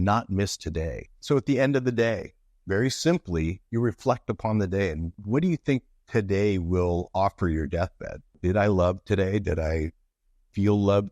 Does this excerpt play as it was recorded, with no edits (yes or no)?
no